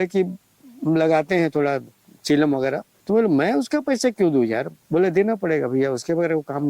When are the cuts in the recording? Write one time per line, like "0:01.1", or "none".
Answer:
0:02.9
0:04.7